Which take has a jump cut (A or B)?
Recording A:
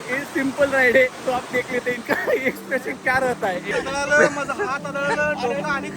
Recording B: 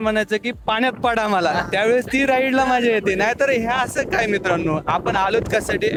A